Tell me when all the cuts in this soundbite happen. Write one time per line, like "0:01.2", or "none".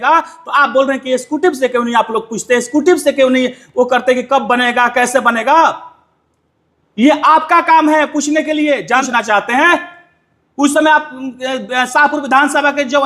0:09.1